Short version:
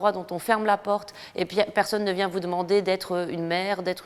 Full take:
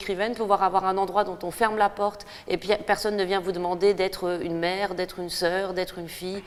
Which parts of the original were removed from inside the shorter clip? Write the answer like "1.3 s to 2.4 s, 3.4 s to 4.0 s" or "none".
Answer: none